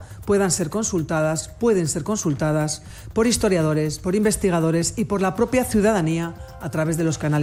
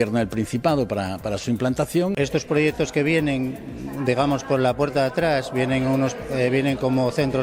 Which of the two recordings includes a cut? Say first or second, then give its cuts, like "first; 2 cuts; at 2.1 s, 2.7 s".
second; 1 cut; at 2.2 s